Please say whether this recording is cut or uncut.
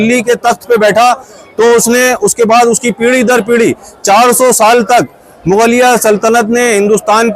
uncut